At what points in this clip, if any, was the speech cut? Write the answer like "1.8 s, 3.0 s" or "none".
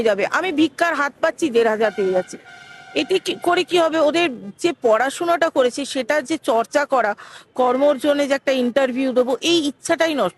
none